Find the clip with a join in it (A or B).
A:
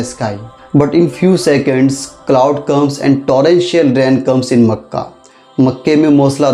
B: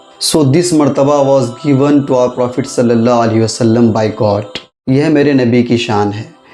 B